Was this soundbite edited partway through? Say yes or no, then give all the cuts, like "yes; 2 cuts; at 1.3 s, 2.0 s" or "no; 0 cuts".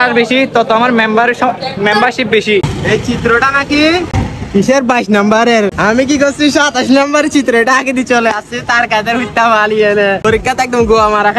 yes; 4 cuts; at 2.7 s, 4.2 s, 5.8 s, 10.2 s